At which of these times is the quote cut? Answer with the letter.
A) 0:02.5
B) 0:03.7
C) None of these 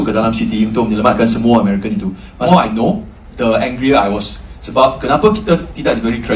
A